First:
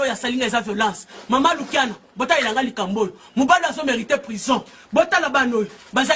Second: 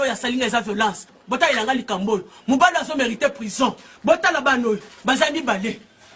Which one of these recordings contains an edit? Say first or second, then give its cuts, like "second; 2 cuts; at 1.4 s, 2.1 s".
second; 1 cut; at 1.1 s